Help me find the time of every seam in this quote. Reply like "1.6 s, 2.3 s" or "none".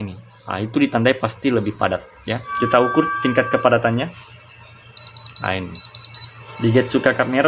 none